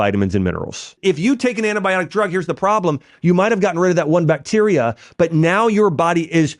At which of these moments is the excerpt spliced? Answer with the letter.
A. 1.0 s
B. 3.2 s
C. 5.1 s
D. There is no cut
A